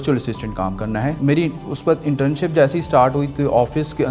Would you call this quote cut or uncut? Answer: cut